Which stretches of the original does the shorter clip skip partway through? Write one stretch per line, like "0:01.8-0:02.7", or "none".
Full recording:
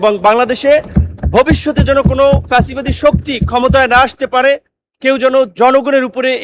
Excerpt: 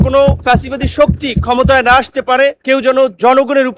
0:04.6-0:05.0